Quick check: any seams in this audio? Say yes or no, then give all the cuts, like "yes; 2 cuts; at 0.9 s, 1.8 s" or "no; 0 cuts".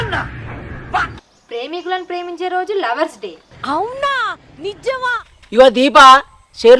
yes; 1 cut; at 5.3 s